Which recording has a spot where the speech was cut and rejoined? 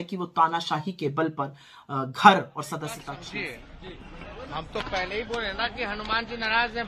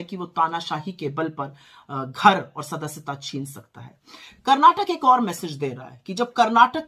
first; 1 cut; at 3.1 s

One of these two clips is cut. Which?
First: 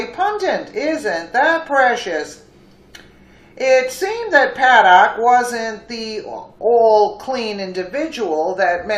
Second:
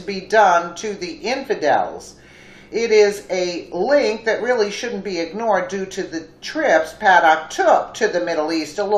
second; 1 cut; at 1.1 s

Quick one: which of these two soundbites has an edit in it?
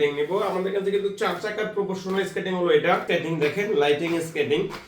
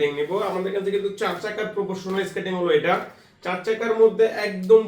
first; 1 cut; at 3.1 s

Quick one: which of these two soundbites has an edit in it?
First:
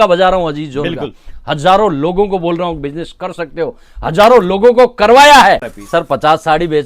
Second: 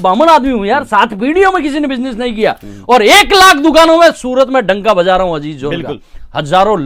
first; 1 cut; at 5.7 s

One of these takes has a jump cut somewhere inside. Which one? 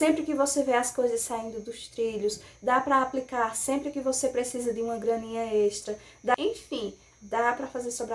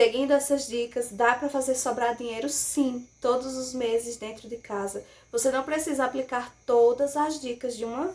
first; 1 cut; at 6.3 s

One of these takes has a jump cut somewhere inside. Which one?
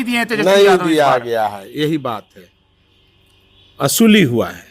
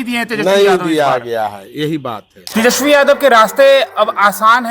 second; 1 cut; at 2.3 s

